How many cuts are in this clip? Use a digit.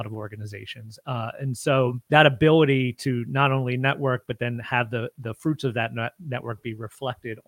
1